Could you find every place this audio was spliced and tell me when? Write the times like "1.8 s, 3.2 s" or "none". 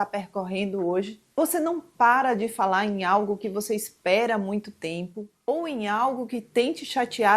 1.2 s